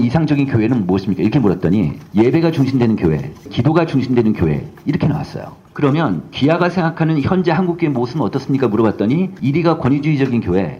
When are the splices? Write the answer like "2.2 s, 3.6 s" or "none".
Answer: 3.5 s, 5.6 s